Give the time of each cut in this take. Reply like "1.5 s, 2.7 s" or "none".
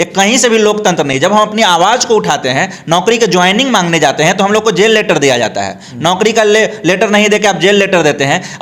none